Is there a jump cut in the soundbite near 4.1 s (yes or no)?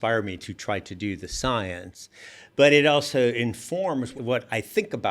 yes